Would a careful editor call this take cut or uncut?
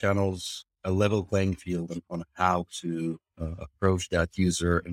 uncut